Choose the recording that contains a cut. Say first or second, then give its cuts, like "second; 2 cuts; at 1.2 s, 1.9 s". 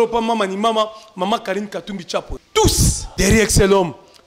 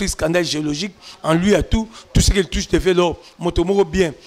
first; 2 cuts; at 2.4 s, 3.0 s